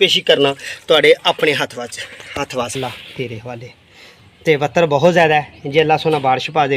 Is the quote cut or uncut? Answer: cut